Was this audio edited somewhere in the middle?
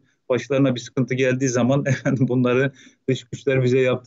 no; 0 cuts

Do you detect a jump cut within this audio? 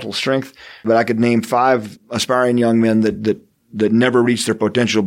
yes; 2 cuts; at 0.9 s, 2.0 s

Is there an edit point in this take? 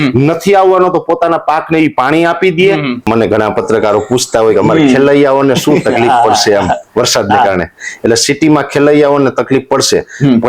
yes; 1 cut; at 3.1 s

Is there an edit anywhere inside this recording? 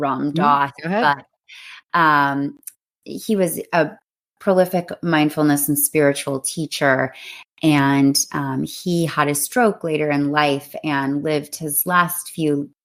no; 0 cuts

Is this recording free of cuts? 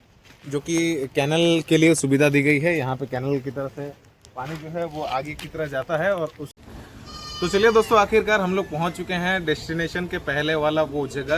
no; 1 cut; at 6.8 s

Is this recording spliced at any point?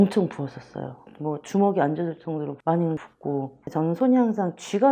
no; 0 cuts

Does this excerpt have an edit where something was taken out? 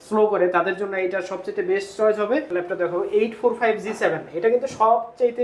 yes; 1 cut; at 2.5 s

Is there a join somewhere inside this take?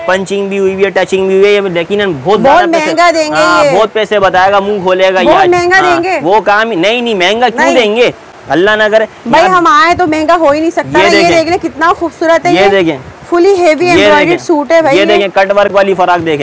no; 0 cuts

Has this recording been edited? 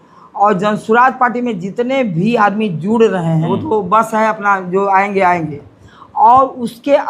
yes; 1 cut; at 3.5 s

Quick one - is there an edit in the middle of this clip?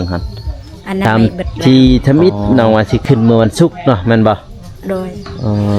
yes; 1 cut; at 1.0 s

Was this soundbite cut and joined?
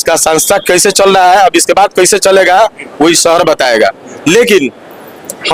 no; 0 cuts

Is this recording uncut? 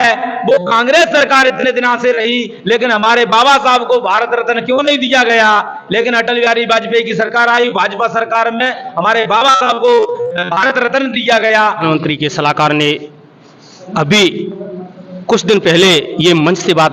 no; 1 cut; at 11.8 s

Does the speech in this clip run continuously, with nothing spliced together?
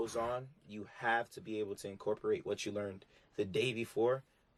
yes; 0 cuts

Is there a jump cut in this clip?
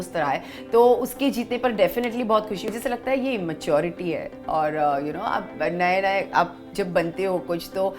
yes; 1 cut; at 2.7 s

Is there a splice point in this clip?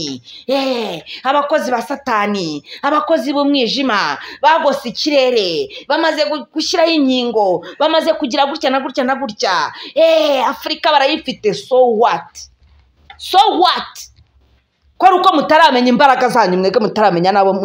no; 0 cuts

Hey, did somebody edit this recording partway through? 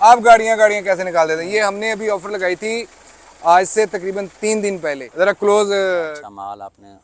yes; 1 cut; at 6.1 s

